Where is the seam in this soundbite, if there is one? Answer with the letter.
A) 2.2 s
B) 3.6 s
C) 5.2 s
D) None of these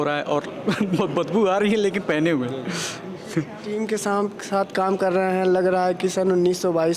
B